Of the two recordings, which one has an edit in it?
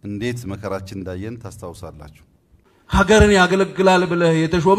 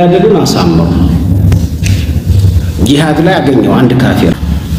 first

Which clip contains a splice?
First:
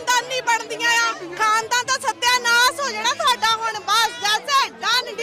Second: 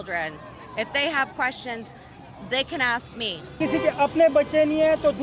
second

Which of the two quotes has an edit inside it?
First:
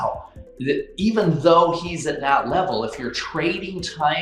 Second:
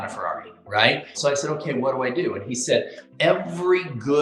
second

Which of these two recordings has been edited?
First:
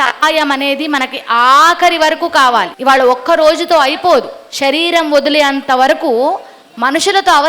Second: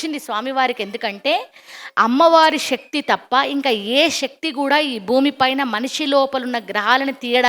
first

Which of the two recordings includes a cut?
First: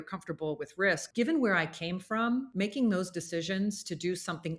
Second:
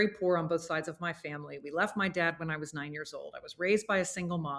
first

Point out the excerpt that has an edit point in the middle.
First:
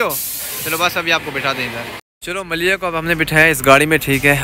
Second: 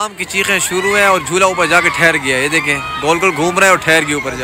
first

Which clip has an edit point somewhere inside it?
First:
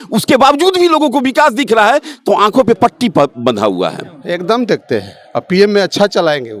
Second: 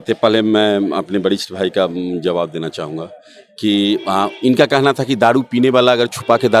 first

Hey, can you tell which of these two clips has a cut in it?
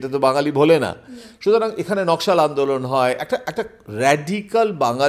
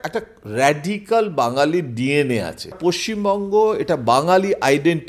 second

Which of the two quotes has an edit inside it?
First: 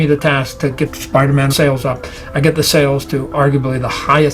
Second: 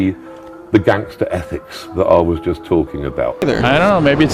second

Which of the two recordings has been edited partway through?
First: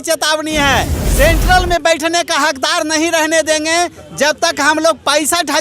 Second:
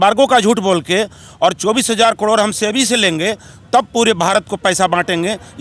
first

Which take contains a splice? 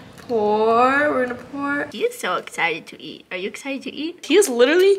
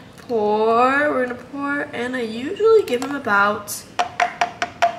first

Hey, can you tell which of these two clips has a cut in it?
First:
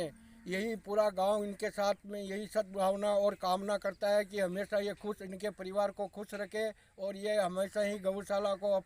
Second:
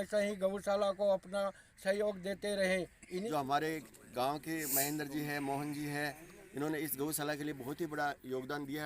second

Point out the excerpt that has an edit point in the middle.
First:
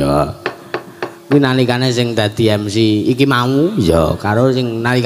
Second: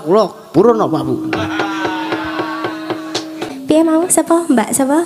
second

